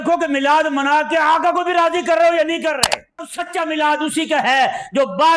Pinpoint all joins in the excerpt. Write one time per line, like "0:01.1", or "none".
0:03.4